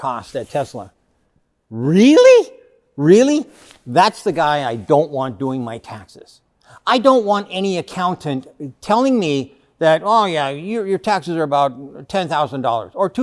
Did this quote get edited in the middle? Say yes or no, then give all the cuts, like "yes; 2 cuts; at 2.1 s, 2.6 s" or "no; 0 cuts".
no; 0 cuts